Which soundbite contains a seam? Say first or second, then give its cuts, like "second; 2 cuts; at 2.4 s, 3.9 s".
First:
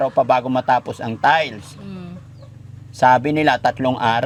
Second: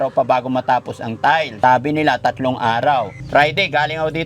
second; 2 cuts; at 1.5 s, 3.2 s